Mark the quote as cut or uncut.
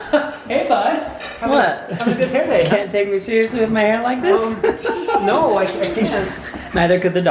uncut